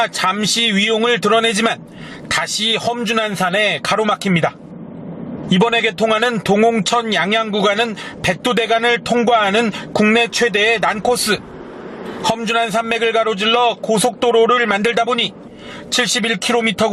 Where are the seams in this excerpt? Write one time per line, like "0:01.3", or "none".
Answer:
0:13.0